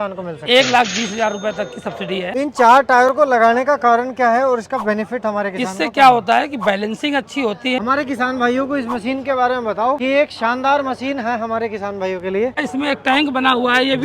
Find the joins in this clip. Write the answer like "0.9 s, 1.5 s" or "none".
2.2 s, 7.8 s, 12.6 s